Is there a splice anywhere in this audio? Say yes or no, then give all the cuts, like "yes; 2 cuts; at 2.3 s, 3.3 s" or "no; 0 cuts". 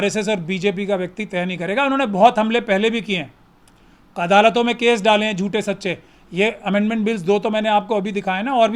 no; 0 cuts